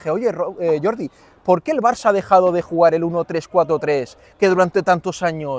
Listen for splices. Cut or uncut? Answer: uncut